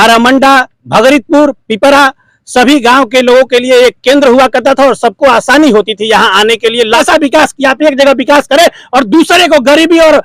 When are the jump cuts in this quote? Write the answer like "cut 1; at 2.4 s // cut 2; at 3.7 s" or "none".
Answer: cut 1; at 7.0 s